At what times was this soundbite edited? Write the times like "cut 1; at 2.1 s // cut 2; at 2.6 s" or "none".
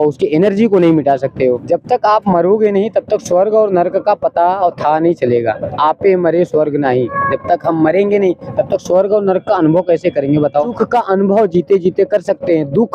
cut 1; at 1.5 s // cut 2; at 10.8 s